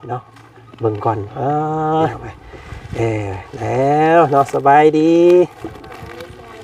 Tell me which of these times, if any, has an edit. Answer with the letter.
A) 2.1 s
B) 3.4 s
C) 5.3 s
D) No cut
A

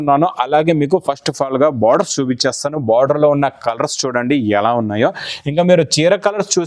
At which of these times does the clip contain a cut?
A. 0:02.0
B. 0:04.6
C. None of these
C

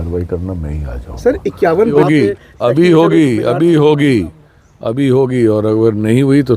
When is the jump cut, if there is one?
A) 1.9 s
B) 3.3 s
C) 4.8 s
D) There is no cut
A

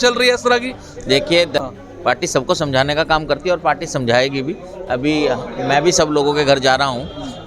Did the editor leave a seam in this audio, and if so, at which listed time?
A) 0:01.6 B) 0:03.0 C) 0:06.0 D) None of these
A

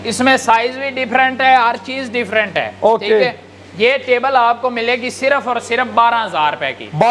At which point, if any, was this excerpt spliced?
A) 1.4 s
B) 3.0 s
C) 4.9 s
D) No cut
D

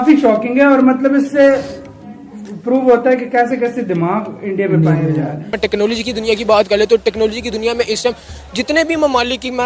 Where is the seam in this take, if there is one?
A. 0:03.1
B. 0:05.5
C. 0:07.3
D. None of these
B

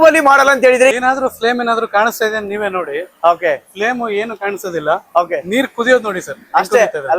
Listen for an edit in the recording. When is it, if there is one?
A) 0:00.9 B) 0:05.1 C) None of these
A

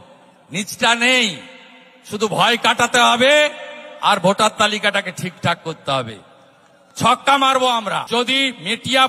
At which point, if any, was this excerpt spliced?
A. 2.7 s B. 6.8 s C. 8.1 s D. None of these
C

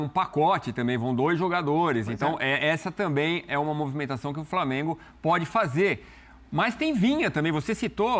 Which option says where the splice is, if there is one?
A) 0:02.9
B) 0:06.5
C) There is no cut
C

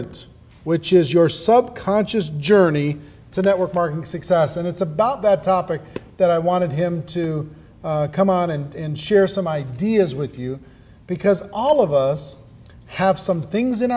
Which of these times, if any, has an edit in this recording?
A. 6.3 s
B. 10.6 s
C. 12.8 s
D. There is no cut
A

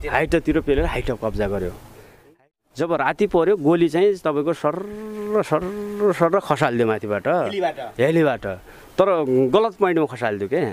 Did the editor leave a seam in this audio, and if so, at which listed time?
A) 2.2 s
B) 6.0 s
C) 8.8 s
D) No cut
A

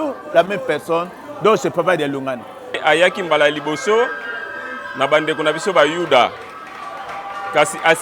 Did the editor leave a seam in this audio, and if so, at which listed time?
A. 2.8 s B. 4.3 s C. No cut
A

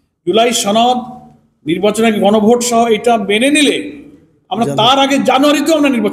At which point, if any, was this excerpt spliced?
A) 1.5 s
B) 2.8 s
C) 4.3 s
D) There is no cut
D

